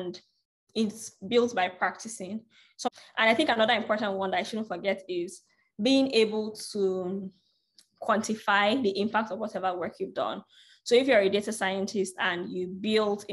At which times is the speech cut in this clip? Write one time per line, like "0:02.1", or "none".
0:02.9